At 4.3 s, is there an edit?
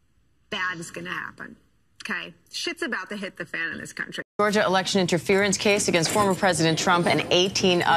yes; 1 cut; at 4.3 s

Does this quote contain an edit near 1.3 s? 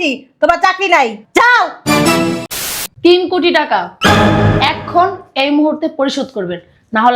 no; 1 cut; at 2.5 s

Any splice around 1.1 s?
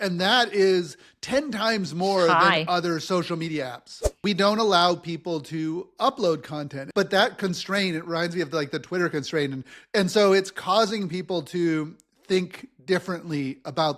no; 2 cuts; at 4.2 s, 6.8 s

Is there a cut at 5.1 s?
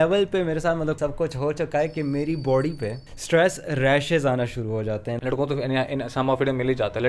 yes; 2 cuts; at 1.0 s, 5.1 s

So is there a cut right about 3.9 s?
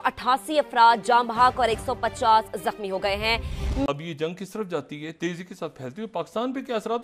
yes; 1 cut; at 3.9 s

